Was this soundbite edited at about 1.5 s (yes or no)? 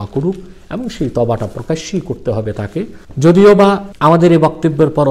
no